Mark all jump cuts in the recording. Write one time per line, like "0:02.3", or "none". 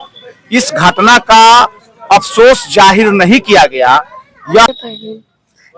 0:04.7